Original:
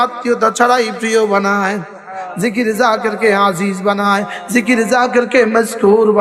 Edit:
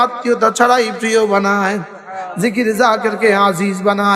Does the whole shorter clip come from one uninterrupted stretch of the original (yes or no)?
yes